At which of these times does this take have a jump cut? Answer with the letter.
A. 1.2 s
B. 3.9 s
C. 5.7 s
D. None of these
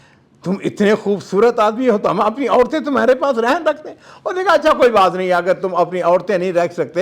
D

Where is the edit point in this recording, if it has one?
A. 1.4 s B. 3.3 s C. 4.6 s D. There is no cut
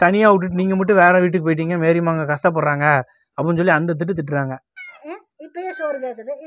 C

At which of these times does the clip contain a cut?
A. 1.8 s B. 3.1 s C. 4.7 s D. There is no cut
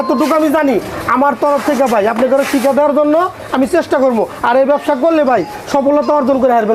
D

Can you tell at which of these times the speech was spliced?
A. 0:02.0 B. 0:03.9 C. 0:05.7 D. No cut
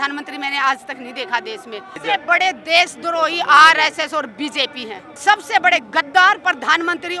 A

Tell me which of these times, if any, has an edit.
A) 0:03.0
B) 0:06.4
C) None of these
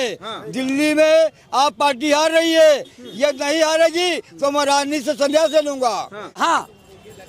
B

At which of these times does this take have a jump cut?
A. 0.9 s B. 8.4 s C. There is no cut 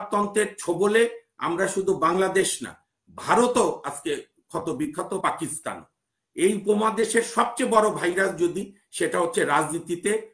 C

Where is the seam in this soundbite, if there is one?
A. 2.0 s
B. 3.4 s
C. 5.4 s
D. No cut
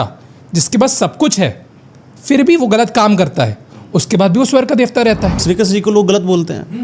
C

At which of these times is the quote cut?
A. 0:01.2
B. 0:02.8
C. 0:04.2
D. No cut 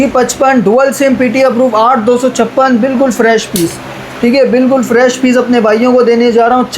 D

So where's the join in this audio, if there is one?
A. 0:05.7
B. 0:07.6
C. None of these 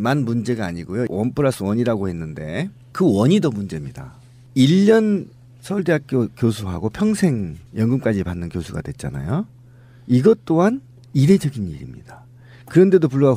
C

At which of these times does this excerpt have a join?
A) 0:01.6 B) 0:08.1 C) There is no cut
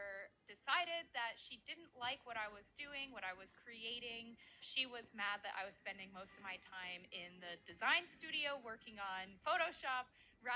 C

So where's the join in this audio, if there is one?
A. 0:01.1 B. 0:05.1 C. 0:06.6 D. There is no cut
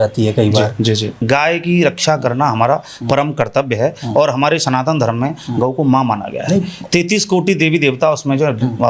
A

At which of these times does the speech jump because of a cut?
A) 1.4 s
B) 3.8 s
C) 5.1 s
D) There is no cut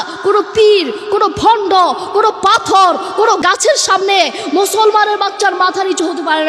D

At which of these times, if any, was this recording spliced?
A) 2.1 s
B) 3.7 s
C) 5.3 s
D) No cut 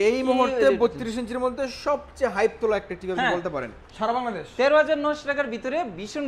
B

